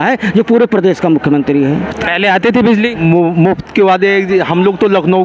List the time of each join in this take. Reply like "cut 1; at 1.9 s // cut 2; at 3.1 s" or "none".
none